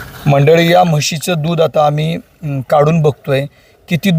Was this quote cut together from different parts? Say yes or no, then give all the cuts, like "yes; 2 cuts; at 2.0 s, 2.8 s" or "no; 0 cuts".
no; 0 cuts